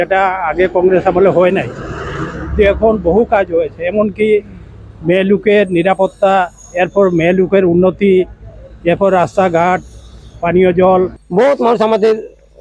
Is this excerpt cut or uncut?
cut